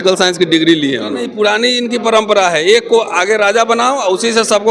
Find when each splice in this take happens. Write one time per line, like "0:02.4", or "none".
0:01.2